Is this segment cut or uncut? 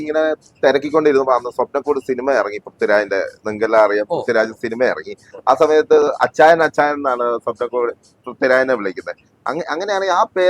uncut